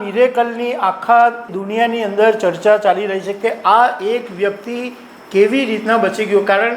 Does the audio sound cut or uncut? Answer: cut